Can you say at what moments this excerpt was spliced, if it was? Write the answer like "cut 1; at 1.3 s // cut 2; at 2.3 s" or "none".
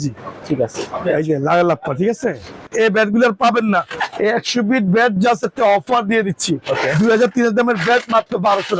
cut 1; at 2.6 s